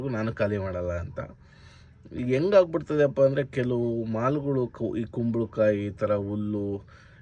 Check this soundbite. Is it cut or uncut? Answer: uncut